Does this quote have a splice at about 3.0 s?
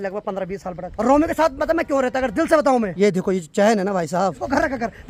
yes; 3 cuts; at 0.9 s, 3.0 s, 4.4 s

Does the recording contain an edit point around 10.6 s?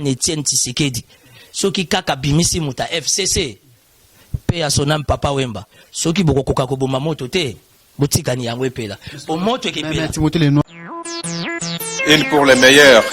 yes; 1 cut; at 10.6 s

